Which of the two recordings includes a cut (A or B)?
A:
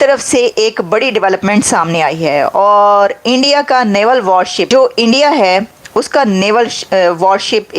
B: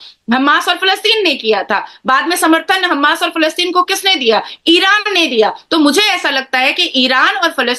A